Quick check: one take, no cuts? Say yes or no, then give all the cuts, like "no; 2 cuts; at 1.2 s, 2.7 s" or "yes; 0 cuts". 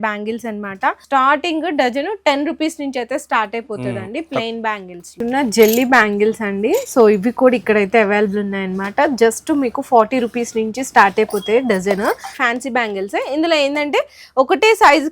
no; 3 cuts; at 1.0 s, 5.1 s, 12.3 s